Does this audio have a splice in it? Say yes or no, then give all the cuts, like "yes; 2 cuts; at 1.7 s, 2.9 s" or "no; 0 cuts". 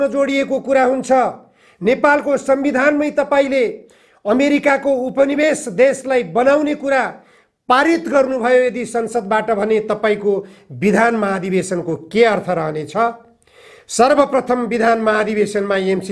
no; 0 cuts